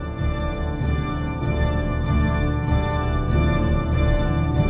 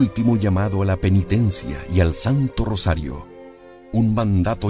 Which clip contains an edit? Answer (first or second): first